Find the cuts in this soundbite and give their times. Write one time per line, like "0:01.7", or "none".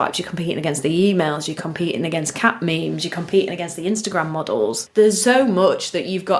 0:04.8

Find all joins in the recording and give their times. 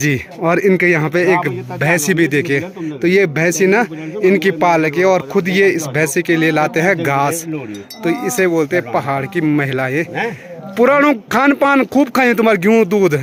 none

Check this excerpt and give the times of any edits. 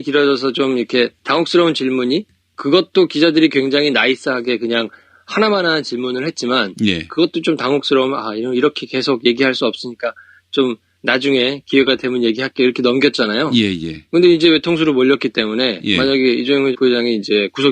0:02.0

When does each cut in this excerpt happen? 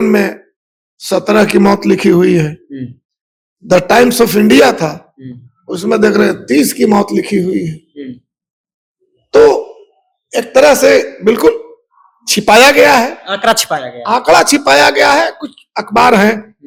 none

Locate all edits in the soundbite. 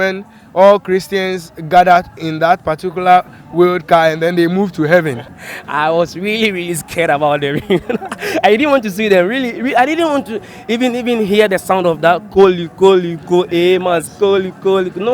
0:05.2

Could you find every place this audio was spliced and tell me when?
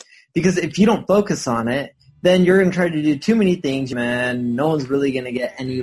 0:03.9

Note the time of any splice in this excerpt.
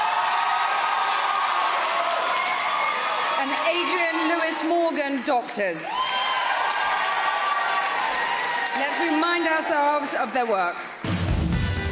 0:06.8

